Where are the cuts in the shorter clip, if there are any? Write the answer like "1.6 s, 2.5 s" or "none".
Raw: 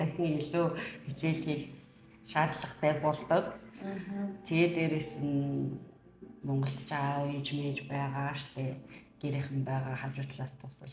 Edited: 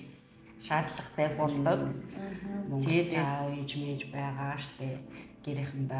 3.2 s